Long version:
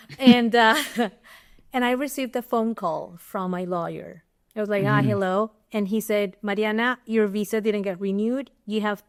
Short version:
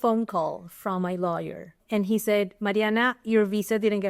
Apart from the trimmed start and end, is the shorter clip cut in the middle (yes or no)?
yes